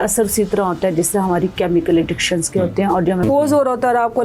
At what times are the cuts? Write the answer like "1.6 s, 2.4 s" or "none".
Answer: 3.2 s